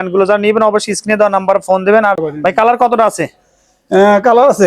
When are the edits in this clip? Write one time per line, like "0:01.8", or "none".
0:02.2